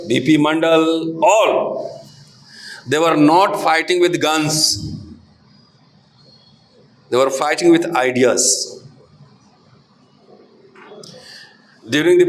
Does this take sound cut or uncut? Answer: uncut